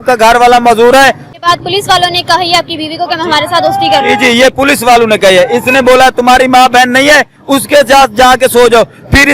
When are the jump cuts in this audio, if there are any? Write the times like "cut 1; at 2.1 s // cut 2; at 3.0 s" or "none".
cut 1; at 1.3 s